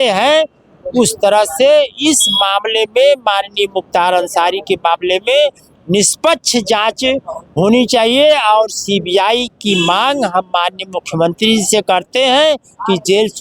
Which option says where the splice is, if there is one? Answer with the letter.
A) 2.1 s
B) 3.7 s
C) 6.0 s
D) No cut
D